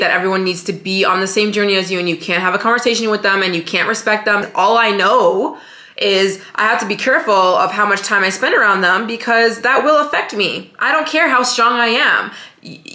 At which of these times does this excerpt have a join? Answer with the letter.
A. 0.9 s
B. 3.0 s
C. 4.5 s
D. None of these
C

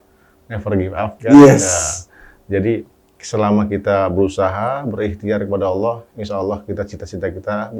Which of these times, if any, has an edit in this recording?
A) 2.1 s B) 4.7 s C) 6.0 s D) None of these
D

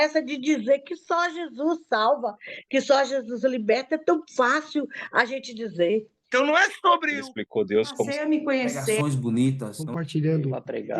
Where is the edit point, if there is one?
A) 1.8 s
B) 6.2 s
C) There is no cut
B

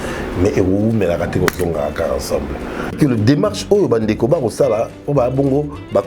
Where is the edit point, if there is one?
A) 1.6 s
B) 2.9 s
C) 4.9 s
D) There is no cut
B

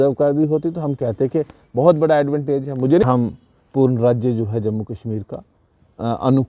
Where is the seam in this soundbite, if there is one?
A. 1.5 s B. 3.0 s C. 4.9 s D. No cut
B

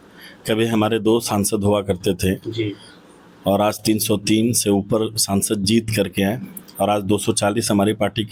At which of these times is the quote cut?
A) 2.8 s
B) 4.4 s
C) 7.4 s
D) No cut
D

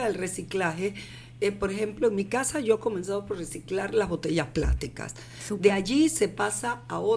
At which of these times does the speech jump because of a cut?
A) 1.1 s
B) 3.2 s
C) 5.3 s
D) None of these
D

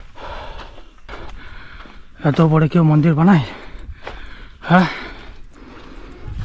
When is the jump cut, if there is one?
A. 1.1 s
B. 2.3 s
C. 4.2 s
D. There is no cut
A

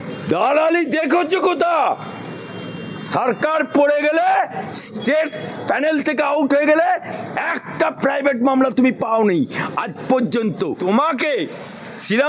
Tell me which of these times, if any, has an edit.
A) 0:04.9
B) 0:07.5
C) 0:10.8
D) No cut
C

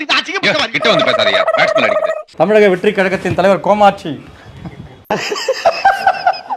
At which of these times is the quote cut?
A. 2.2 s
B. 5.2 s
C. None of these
A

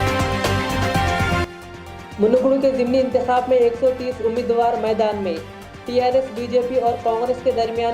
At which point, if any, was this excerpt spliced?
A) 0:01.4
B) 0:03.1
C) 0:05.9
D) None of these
A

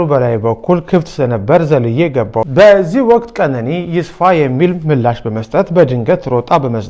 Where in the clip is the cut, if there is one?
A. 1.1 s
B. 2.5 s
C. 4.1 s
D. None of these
B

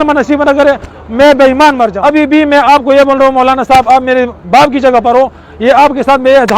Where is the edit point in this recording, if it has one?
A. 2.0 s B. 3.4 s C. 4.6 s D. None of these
A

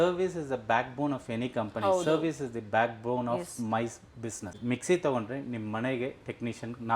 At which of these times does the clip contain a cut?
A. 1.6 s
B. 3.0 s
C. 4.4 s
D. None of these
C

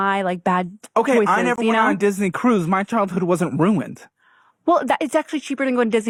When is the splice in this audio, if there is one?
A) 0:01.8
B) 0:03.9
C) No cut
C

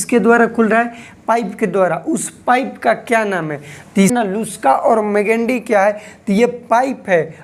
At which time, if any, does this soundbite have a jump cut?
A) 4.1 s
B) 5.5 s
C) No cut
A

